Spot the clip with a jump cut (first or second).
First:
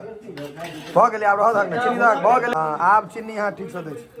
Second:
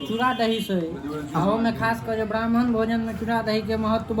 first